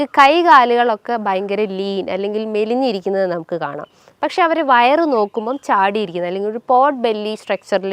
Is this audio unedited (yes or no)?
yes